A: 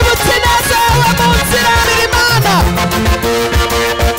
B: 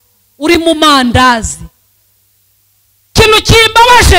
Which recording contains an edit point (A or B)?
A